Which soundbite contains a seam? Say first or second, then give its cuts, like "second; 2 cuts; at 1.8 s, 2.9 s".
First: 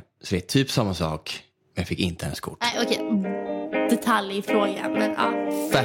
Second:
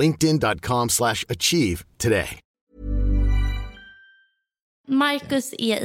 second; 2 cuts; at 2.7 s, 4.7 s